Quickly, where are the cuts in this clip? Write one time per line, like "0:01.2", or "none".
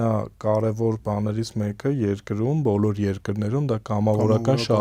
none